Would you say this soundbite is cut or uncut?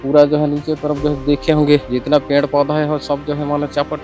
cut